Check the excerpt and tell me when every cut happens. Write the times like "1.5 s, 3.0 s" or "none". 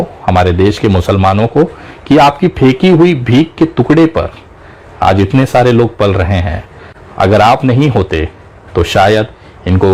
none

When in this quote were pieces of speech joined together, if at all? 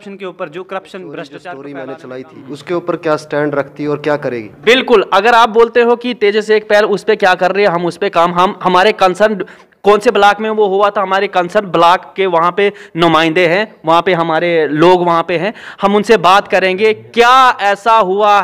1.6 s

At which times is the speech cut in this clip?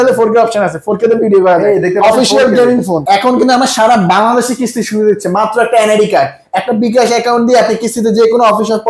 3.0 s

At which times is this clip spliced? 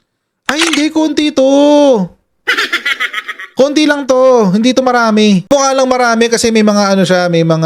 5.5 s

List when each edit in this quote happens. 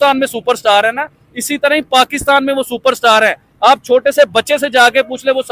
none

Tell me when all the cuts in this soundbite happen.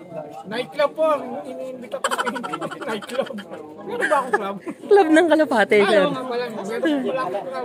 none

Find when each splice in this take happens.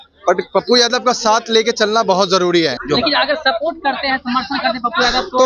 2.8 s

